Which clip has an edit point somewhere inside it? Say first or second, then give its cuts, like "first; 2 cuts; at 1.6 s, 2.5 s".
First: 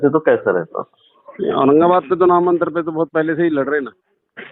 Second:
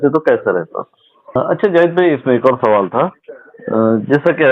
second; 1 cut; at 1.4 s